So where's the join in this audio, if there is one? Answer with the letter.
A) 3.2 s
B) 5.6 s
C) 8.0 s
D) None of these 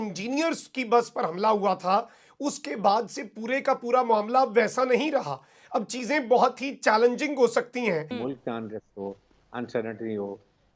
C